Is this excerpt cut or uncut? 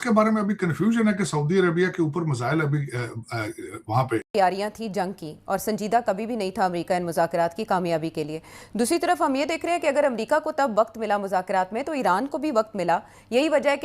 cut